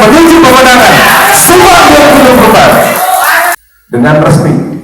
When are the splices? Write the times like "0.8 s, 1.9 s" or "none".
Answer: 3.5 s